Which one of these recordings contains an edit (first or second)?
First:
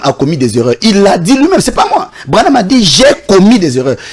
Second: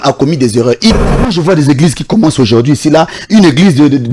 second